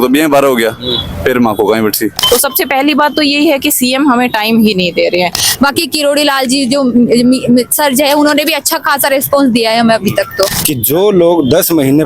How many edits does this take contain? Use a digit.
3